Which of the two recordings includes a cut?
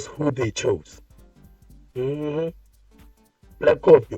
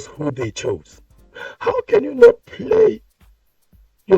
second; 1 cut; at 1.5 s

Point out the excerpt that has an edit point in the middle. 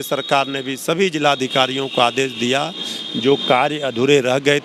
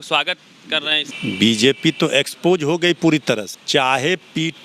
second; 2 cuts; at 1.0 s, 3.5 s

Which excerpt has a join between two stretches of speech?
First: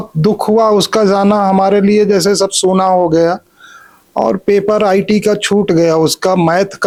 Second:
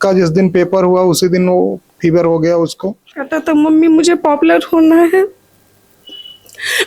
second; 1 cut; at 3.0 s

